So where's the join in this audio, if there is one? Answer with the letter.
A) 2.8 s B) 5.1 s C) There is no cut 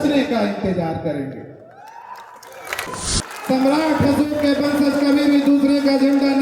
A